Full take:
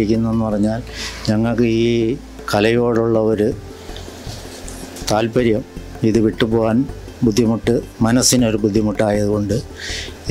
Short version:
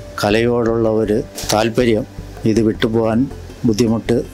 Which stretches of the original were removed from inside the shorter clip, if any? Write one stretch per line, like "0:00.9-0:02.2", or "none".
0:03.7-0:04.9